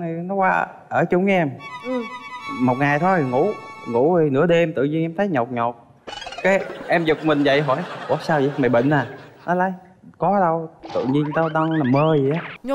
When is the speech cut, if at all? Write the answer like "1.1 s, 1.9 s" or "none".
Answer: none